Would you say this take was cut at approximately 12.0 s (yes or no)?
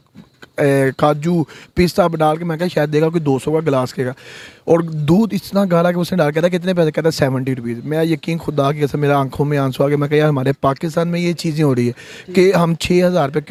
no